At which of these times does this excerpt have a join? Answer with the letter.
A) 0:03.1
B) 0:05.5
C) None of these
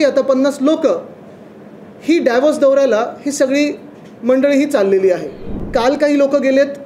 B